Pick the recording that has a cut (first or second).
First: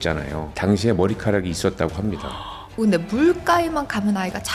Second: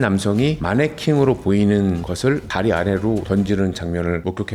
first